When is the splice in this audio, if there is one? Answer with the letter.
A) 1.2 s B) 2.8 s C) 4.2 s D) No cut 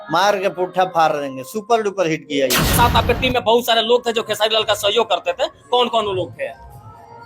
B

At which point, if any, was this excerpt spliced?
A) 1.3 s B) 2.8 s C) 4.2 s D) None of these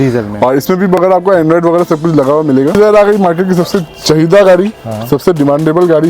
B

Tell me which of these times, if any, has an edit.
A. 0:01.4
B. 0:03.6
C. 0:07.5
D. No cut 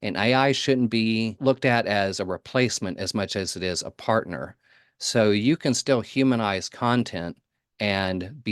A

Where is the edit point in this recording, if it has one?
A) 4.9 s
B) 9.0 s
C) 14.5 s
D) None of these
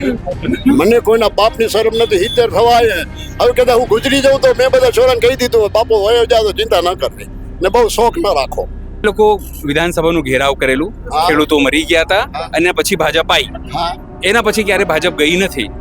B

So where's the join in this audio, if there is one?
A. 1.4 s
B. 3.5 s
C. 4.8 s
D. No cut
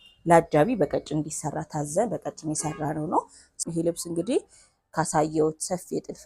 B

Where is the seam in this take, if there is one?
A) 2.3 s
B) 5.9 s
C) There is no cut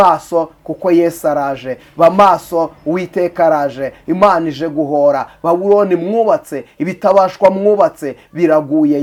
C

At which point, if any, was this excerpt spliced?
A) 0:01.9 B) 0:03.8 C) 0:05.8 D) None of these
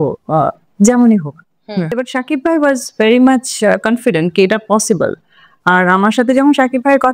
A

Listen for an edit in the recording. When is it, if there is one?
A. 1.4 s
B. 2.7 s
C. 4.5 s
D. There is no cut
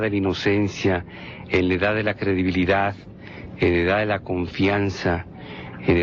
D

